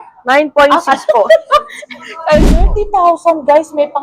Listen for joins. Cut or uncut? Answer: cut